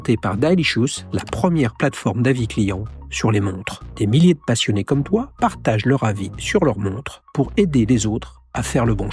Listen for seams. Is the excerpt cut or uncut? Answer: uncut